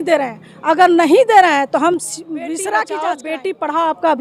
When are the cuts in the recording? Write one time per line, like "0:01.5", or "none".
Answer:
0:03.2